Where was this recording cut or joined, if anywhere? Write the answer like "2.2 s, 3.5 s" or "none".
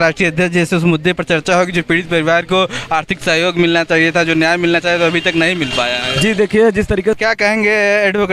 7.1 s